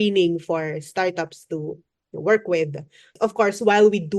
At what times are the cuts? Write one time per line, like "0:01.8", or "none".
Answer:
0:03.1

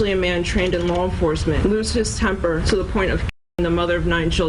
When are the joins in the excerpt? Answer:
0:01.6
0:02.6

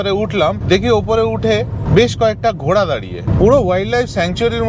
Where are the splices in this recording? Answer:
0:03.2

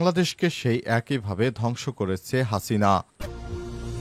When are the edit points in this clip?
0:03.1

